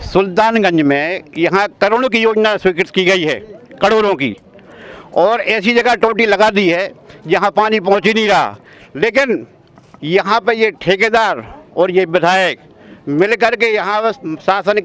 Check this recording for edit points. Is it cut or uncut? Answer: uncut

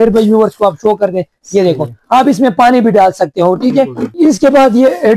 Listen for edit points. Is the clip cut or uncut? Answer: cut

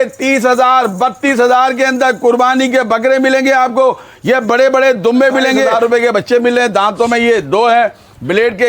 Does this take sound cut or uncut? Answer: cut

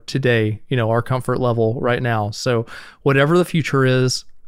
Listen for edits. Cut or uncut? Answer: uncut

